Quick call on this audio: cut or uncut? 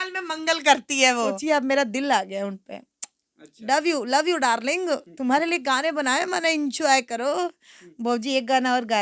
cut